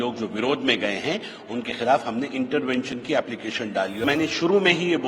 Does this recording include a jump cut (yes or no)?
yes